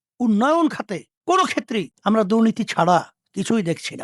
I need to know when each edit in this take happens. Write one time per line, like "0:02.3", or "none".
0:01.1
0:01.9